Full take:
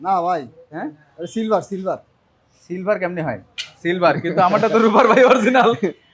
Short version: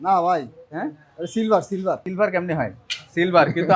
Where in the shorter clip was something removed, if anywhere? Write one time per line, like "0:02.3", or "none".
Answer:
0:02.1